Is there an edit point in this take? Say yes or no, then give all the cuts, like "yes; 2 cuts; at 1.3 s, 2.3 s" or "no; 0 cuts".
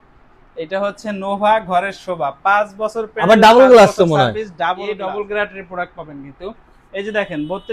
yes; 1 cut; at 4.9 s